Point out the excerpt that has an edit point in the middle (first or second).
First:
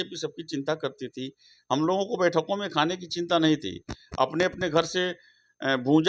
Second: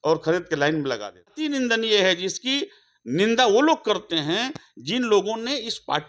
second